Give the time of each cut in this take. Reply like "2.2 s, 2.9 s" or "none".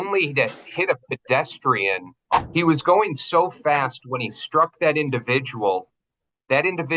2.4 s